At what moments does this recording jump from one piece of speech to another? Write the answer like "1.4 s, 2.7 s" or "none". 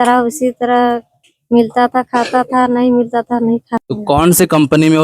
3.8 s